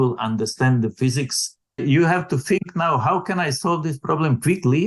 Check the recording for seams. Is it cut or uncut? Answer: cut